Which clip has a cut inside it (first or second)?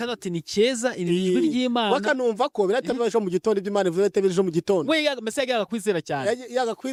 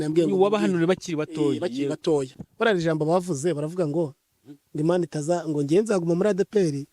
second